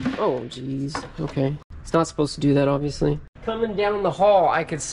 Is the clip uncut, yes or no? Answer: no